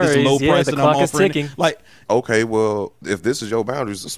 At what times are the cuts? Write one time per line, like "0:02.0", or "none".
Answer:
0:02.0